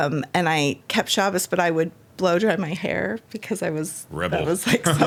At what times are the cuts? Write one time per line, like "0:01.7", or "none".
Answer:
none